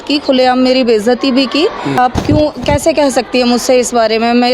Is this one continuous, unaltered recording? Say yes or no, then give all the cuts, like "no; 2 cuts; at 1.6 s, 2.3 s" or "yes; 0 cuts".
no; 1 cut; at 2.0 s